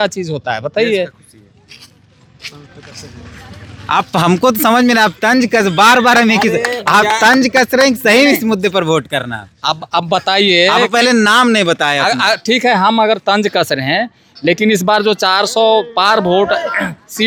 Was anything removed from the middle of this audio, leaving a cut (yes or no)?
no